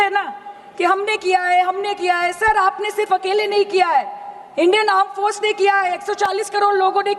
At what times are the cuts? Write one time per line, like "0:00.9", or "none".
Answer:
none